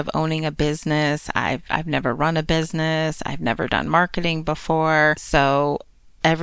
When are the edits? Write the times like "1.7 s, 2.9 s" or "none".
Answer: 5.2 s

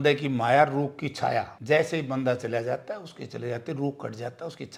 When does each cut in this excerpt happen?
none

